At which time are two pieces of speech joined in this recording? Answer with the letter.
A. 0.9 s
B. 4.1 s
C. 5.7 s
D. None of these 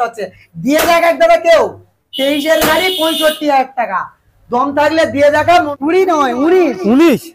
C